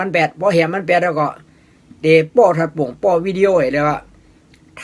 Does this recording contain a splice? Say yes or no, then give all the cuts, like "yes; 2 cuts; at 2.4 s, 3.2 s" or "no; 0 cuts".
no; 0 cuts